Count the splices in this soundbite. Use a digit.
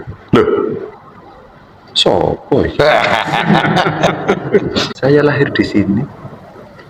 1